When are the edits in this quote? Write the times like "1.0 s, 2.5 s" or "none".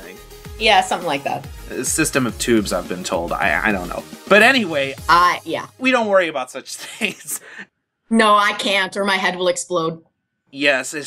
6.3 s